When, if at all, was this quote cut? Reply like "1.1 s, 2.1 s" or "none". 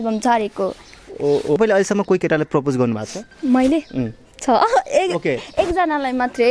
1.6 s

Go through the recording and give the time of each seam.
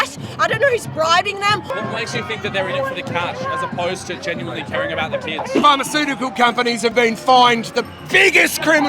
1.7 s, 5.5 s, 6.9 s

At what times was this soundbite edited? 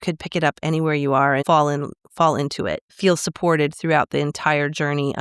1.4 s, 2.9 s

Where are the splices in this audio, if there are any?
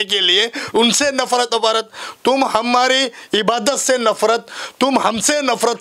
none

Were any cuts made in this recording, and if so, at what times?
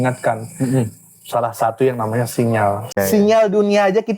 2.9 s

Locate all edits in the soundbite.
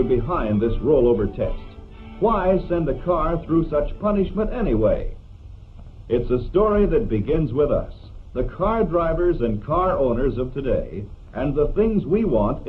6.8 s

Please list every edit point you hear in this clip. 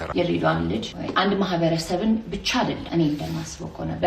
1.0 s, 2.8 s

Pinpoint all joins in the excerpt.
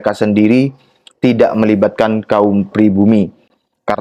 none

